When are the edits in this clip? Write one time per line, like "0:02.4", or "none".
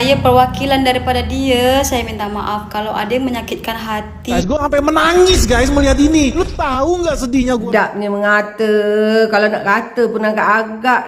0:04.4
0:07.6